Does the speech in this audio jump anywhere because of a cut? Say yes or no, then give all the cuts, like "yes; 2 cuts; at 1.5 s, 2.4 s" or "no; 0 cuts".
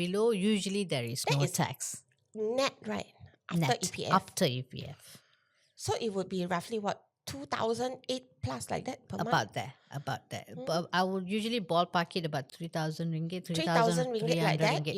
yes; 1 cut; at 12.5 s